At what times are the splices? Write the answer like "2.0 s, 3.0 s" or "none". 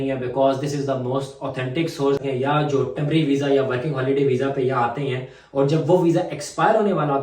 2.2 s